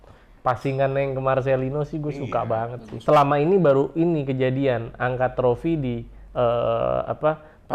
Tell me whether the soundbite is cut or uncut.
cut